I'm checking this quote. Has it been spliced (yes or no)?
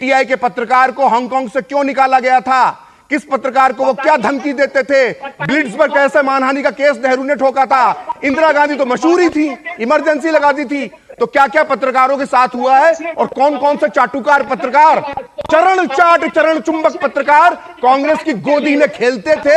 no